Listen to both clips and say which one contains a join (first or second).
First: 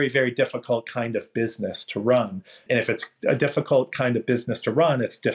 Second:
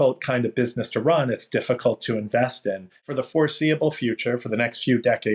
second